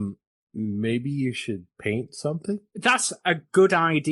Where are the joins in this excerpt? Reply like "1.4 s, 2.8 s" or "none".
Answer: 2.7 s